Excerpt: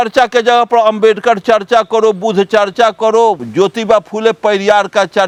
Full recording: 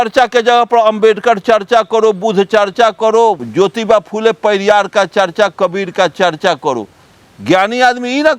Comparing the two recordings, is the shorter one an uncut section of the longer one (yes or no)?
yes